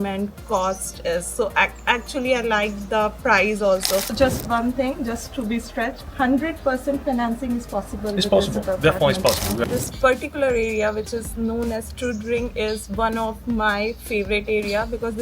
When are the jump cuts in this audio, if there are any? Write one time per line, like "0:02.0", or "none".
0:04.1
0:09.7